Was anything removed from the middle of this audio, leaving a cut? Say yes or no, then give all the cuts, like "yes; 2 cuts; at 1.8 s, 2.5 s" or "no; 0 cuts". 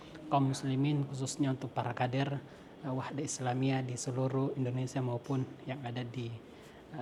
no; 0 cuts